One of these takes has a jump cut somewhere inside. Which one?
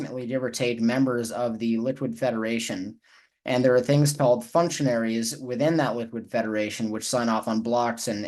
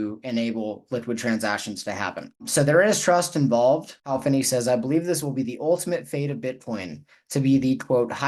second; 1 cut; at 3.9 s

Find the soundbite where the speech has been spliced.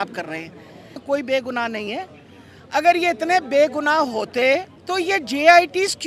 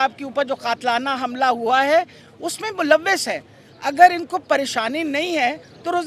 first; 2 cuts; at 1.0 s, 4.8 s

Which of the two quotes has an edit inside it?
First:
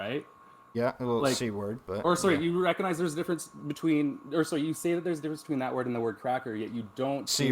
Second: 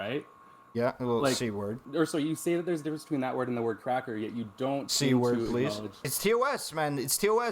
second; 2 cuts; at 1.8 s, 6.1 s

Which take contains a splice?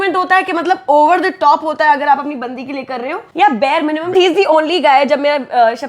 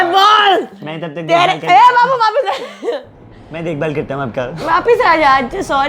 first; 2 cuts; at 3.2 s, 4.1 s

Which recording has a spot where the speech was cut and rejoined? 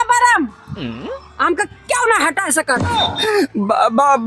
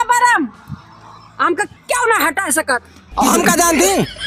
first; 1 cut; at 3.1 s

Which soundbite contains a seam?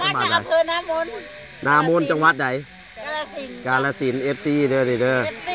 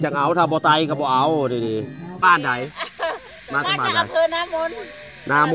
second; 1 cut; at 2.1 s

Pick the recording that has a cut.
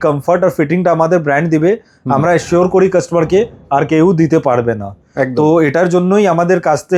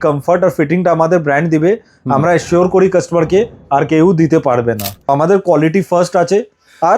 second; 1 cut; at 5.1 s

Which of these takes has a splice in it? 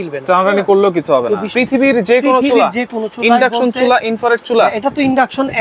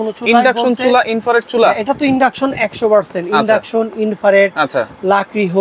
first; 1 cut; at 1.5 s

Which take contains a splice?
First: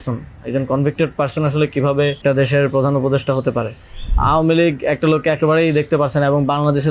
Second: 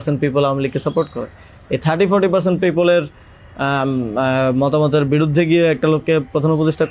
first; 2 cuts; at 2.2 s, 4.1 s

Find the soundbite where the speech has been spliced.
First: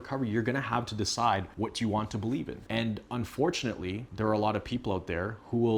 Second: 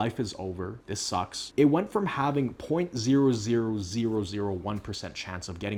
first; 3 cuts; at 1.5 s, 2.6 s, 4.0 s

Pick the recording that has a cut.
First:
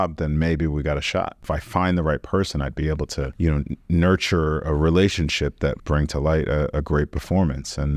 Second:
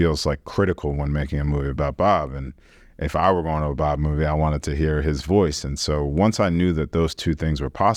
first; 3 cuts; at 1.4 s, 3.3 s, 5.8 s

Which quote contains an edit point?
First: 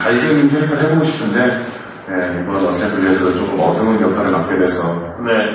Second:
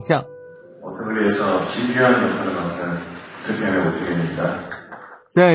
first; 1 cut; at 3.0 s

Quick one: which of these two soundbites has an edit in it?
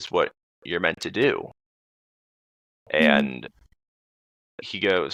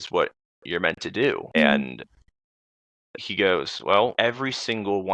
second; 2 cuts; at 1.5 s, 4.1 s

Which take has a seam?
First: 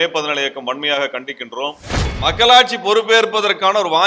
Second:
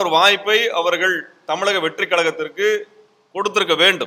first; 1 cut; at 2.1 s

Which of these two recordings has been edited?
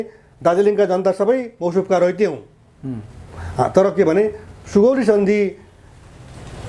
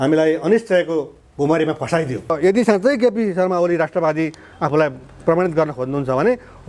second; 1 cut; at 2.3 s

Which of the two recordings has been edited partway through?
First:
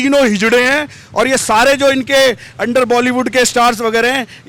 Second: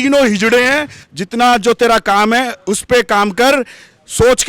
second; 1 cut; at 1.0 s

